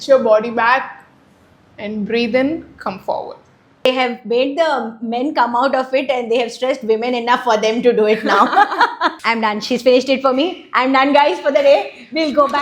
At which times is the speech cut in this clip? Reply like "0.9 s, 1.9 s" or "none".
3.9 s, 9.2 s